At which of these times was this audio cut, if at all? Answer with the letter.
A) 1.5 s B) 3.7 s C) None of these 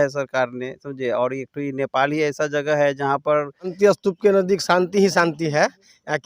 B